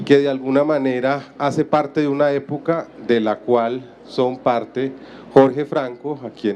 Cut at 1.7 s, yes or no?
yes